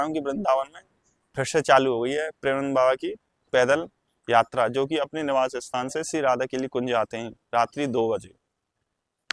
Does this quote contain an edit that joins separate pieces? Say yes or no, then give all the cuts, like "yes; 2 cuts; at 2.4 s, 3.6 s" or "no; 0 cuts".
no; 0 cuts